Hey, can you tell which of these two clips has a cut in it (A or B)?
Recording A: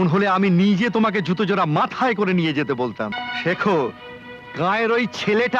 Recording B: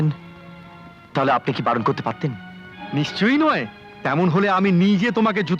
A